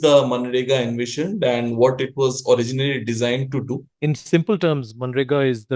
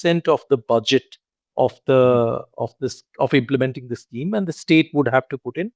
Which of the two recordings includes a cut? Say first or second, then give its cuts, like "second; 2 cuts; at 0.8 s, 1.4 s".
first; 1 cut; at 3.9 s